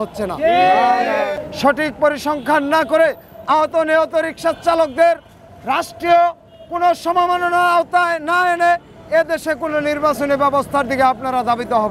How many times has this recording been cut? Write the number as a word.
one